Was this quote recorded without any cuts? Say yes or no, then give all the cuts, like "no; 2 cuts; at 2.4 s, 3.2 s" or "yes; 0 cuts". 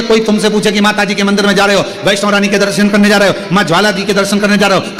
yes; 0 cuts